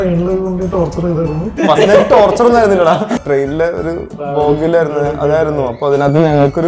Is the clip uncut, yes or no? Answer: no